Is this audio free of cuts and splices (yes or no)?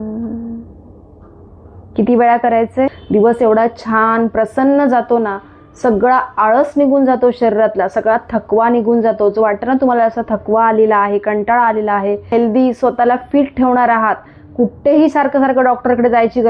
no